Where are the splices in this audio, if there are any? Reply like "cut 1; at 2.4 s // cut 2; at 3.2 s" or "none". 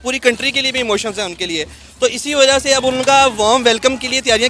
none